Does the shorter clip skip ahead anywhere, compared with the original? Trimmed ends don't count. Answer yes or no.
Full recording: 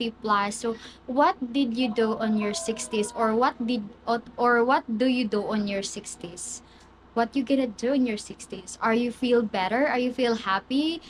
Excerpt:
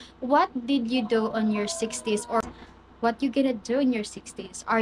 yes